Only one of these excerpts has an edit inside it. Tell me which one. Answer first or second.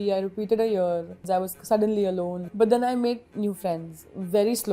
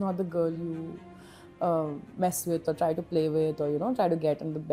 first